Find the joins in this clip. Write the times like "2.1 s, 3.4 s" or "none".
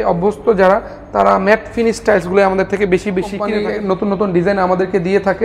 3.4 s